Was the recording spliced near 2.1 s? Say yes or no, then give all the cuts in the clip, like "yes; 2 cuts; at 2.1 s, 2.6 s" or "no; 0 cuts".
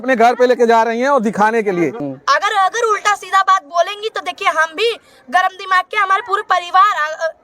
yes; 1 cut; at 2.1 s